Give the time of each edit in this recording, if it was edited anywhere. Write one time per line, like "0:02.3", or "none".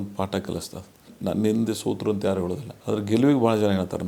0:01.1
0:02.7